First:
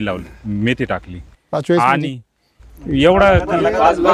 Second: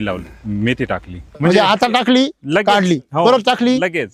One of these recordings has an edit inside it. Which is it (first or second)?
second